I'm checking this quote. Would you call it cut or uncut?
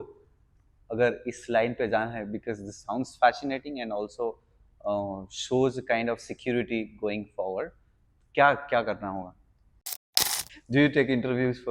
cut